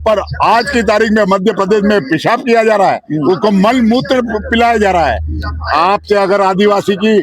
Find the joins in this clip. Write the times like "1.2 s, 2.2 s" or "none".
none

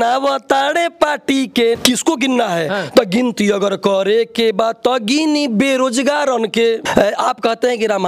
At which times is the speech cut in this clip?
1.8 s, 6.8 s

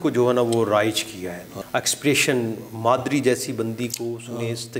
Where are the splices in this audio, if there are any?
1.5 s

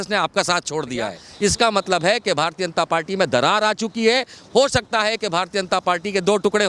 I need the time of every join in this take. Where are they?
1.2 s

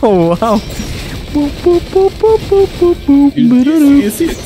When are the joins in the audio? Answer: 3.4 s

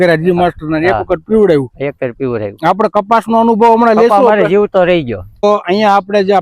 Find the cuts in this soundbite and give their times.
5.4 s

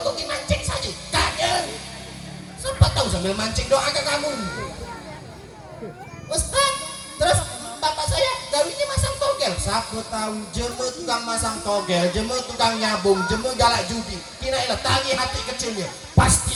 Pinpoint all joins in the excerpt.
none

